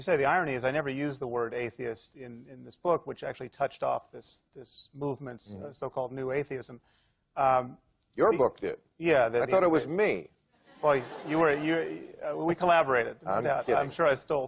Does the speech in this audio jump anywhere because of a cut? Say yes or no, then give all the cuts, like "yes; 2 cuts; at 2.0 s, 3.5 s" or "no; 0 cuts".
yes; 1 cut; at 5.0 s